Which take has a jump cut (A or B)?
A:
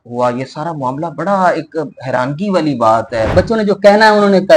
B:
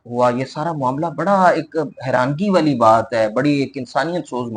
A